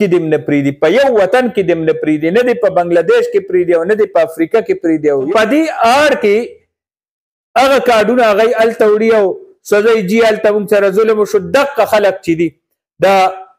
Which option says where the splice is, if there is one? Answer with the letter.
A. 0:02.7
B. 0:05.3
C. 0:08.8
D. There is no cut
B